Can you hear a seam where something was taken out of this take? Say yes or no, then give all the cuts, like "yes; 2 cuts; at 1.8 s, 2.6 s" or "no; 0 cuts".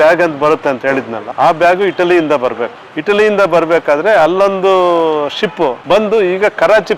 no; 0 cuts